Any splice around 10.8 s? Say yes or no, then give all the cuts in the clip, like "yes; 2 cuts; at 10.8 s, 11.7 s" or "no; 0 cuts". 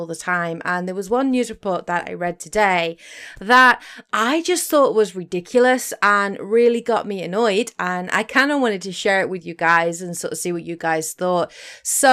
yes; 1 cut; at 10.8 s